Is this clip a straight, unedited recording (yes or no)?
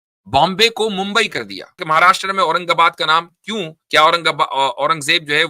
no